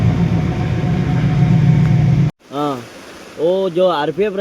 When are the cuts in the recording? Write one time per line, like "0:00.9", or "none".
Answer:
0:02.4